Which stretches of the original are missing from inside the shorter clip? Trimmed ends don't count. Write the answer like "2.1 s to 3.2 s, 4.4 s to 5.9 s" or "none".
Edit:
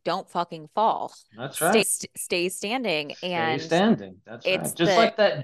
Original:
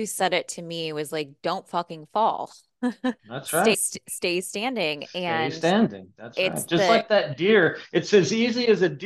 2.7 s to 3.2 s